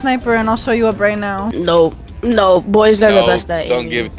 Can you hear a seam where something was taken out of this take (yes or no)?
no